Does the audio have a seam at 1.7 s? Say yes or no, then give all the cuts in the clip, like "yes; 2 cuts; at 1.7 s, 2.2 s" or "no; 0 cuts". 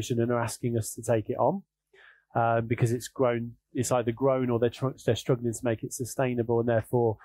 no; 0 cuts